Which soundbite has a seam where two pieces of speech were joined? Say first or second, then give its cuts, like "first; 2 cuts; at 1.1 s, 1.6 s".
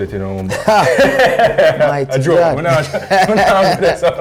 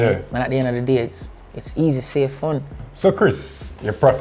second; 1 cut; at 2.8 s